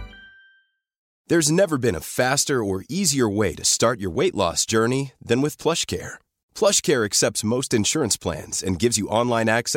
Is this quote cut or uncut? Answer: cut